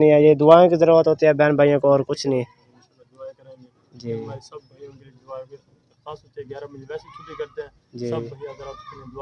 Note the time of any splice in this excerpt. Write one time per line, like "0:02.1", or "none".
none